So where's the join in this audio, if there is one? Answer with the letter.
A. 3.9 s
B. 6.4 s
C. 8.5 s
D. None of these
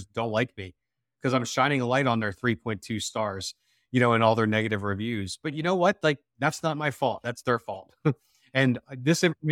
D